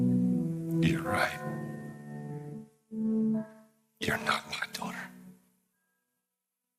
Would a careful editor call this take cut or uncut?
cut